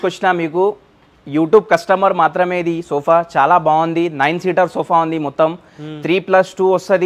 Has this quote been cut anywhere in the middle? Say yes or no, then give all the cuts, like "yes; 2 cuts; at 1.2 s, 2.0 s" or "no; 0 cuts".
no; 0 cuts